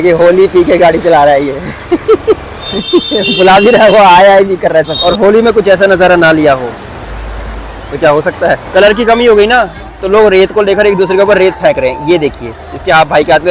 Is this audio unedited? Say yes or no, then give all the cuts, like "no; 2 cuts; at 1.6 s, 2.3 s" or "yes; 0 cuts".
no; 2 cuts; at 4.9 s, 8.6 s